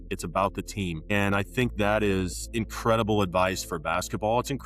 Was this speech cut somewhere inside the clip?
yes; 2 cuts; at 1.1 s, 2.4 s

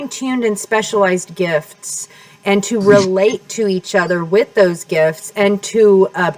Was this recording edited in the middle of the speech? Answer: no; 0 cuts

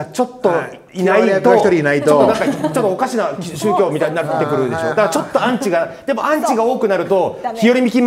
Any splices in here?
no; 0 cuts

